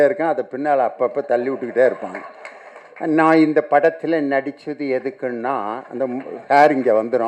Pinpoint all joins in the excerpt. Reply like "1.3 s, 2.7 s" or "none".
none